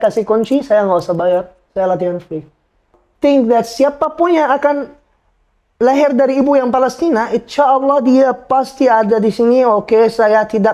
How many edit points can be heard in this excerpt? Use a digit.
1